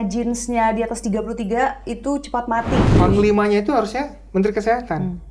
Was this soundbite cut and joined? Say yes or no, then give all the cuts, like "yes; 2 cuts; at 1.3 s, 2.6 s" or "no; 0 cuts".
yes; 1 cut; at 2.9 s